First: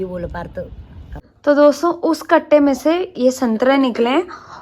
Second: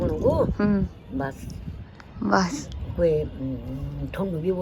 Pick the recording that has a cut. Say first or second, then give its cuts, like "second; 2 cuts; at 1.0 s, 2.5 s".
first; 1 cut; at 1.2 s